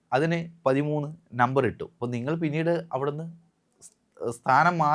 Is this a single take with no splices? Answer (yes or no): no